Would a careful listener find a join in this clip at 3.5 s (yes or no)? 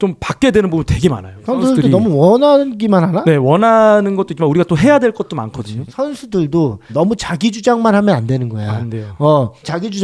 no